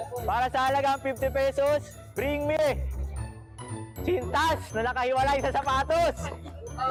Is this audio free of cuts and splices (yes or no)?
yes